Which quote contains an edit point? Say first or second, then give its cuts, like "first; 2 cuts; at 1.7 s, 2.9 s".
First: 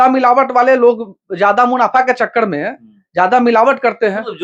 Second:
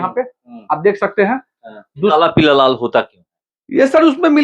second; 1 cut; at 2.1 s